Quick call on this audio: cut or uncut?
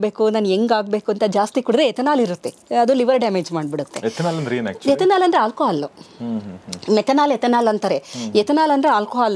uncut